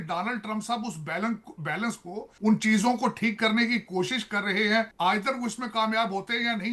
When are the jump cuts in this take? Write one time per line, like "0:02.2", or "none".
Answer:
none

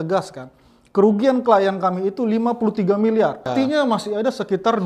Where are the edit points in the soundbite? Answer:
0:03.5

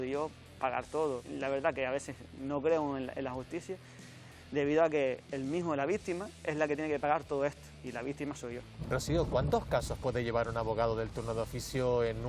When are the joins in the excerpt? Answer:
0:08.7

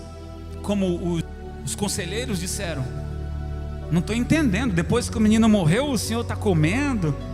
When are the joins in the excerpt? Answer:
0:01.3

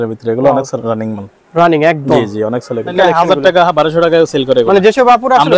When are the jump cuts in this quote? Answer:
0:02.9

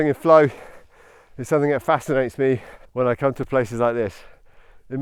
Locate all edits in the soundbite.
0:02.8

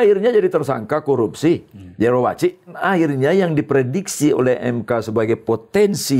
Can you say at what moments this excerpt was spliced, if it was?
0:02.7

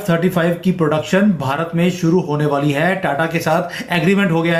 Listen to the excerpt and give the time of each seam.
none

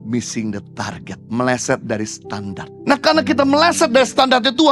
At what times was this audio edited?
0:01.1
0:02.7

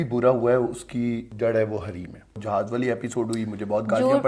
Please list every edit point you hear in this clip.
0:01.3
0:02.4

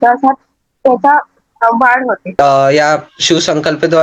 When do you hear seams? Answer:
0:02.4

